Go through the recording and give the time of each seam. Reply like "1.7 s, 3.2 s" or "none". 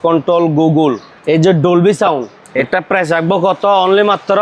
1.1 s, 2.4 s